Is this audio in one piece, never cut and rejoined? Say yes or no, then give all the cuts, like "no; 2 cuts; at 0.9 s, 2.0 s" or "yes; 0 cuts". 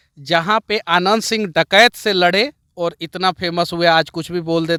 yes; 0 cuts